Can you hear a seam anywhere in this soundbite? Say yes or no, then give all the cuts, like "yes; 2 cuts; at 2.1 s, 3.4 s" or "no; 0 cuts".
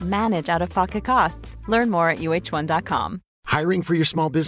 no; 0 cuts